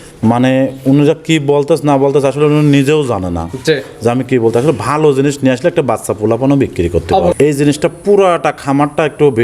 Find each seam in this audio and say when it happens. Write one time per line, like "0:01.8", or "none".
0:07.3